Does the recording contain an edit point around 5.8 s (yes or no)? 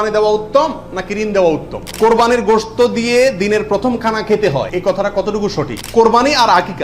yes